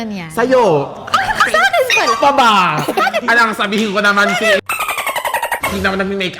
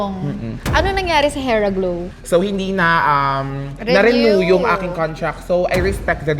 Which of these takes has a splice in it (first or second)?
second